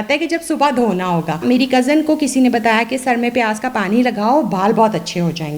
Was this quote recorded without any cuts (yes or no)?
no